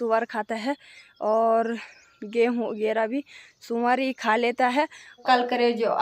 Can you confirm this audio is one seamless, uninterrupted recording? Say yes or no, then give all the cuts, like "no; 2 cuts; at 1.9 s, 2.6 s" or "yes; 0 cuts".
no; 1 cut; at 5.1 s